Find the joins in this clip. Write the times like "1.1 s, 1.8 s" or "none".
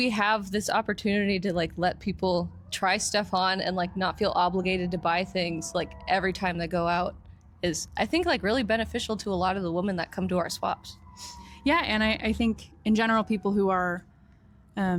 none